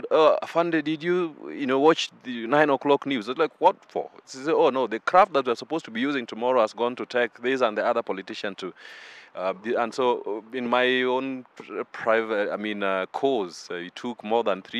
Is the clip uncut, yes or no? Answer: yes